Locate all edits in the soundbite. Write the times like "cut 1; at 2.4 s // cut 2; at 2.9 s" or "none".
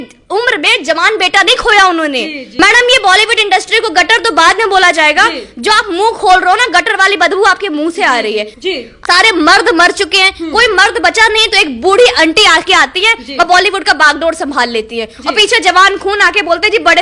cut 1; at 2.5 s // cut 2; at 8.9 s